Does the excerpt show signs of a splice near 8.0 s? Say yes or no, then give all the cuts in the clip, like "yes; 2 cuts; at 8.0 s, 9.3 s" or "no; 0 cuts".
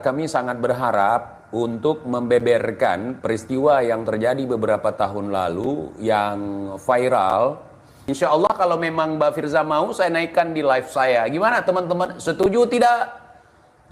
yes; 1 cut; at 8.0 s